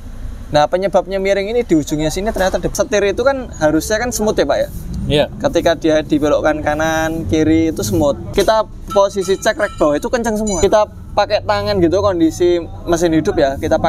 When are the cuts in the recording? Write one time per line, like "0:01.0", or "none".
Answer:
0:02.7
0:08.2
0:10.6

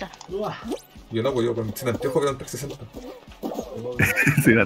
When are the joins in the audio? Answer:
none

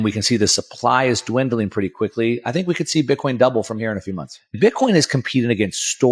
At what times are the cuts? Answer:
0:04.5

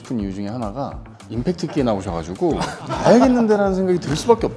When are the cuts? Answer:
0:01.1
0:02.9

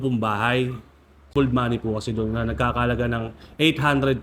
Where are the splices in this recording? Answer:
0:01.3

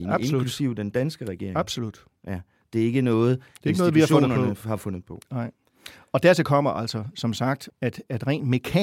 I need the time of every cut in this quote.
0:07.7

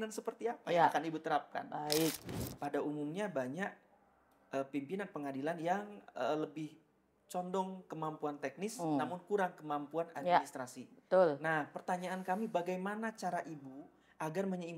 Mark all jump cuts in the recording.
0:02.3

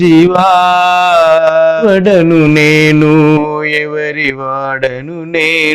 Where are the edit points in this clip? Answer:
0:01.8

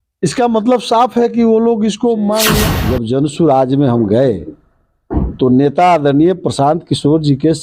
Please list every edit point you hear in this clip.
0:02.7

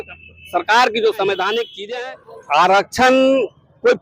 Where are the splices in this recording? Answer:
0:01.8

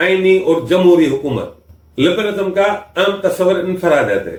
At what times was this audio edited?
none

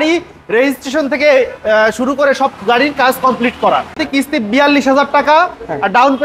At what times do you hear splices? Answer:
0:04.0

